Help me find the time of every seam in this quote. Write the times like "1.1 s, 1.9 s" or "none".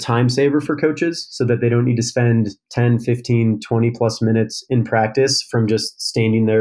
none